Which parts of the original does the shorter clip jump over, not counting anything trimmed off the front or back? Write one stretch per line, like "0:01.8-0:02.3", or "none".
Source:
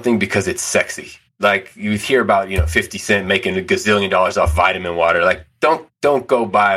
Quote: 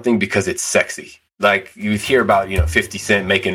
none